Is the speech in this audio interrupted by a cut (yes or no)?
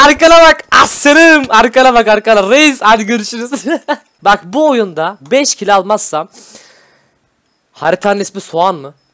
yes